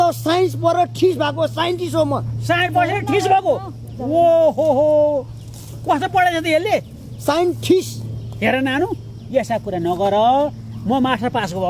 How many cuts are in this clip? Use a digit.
0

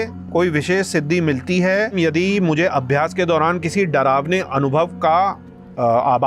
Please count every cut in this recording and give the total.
1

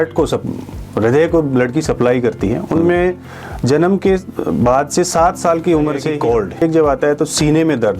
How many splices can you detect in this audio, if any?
1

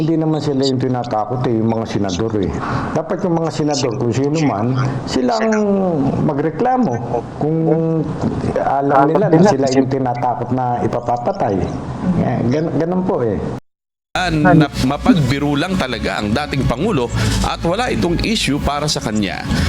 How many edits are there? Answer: 1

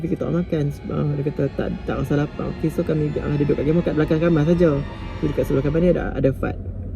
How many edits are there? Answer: 1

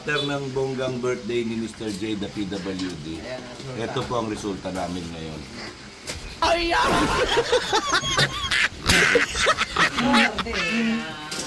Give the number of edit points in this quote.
0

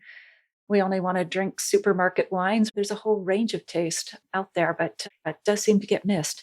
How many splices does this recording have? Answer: 2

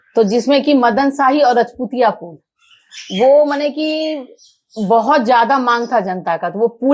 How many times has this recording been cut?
0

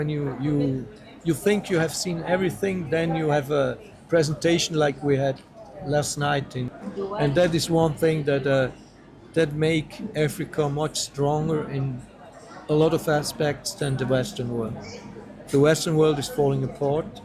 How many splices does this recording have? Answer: 1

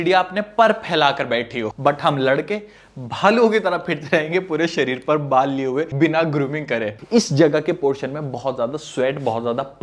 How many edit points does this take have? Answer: 2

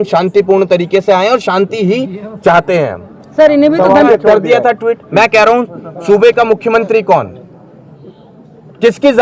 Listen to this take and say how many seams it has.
1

